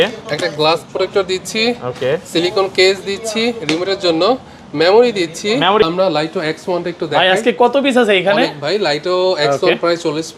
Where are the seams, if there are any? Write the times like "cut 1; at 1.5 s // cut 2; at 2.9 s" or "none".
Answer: cut 1; at 5.8 s